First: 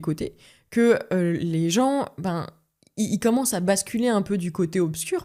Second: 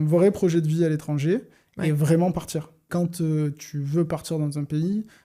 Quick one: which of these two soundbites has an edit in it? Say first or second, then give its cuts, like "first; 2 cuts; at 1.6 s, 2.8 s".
second; 1 cut; at 2.8 s